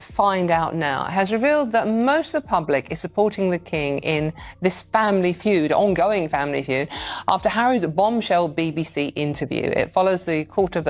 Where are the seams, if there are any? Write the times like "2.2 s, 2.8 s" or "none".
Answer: none